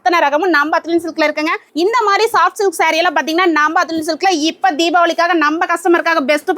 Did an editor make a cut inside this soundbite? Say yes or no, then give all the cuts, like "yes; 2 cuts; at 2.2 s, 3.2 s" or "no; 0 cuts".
yes; 1 cut; at 1.6 s